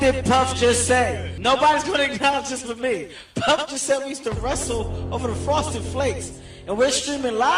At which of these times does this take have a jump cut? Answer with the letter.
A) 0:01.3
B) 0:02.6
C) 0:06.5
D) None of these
A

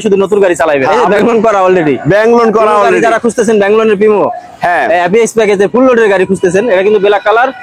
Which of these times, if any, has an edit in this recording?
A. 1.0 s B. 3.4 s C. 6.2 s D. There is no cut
A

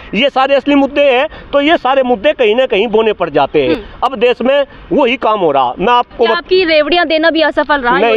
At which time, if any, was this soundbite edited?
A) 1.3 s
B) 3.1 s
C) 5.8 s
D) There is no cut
D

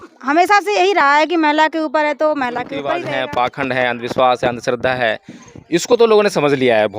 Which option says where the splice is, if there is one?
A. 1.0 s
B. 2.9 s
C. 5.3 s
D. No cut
B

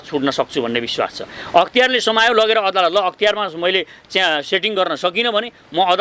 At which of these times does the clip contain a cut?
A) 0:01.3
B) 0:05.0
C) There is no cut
C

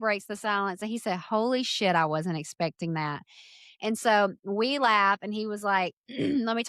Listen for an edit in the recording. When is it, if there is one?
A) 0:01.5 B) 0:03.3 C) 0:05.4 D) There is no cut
D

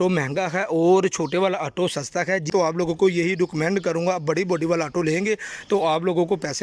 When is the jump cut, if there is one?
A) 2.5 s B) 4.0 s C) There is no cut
A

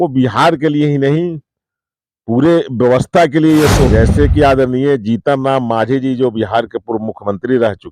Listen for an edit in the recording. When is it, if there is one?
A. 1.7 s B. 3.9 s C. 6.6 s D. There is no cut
B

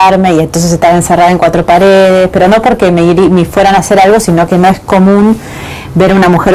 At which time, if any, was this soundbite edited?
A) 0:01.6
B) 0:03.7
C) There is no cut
B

